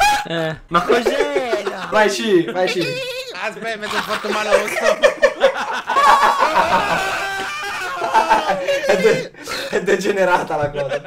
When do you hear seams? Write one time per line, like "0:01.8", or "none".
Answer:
none